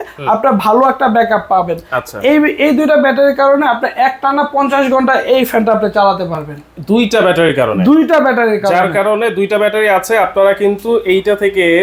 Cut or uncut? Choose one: uncut